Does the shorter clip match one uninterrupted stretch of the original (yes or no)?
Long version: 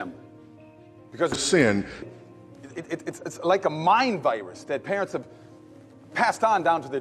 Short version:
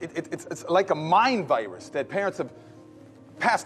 yes